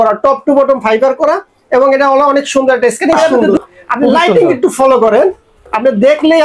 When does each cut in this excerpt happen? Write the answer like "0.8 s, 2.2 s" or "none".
3.3 s

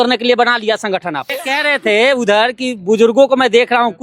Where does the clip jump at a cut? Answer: 1.4 s

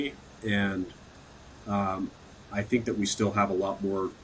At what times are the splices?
none

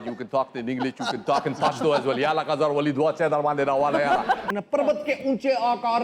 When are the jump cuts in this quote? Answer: 4.5 s

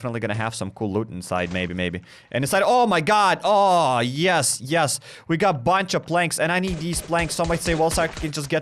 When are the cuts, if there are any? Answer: none

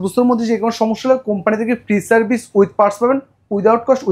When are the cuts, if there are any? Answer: none

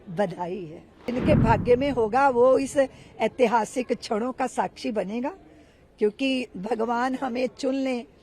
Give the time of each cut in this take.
1.1 s

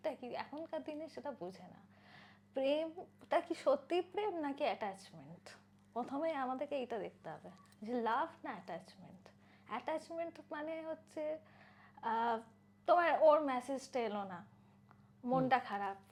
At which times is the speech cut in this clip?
none

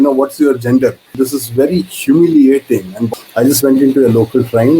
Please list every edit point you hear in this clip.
1.1 s, 3.0 s

